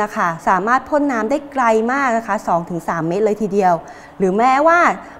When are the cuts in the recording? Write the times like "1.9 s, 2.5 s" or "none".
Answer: none